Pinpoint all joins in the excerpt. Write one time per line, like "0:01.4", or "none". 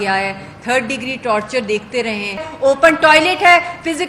0:02.4